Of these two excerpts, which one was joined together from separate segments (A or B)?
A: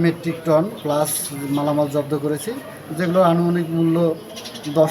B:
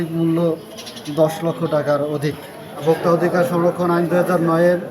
B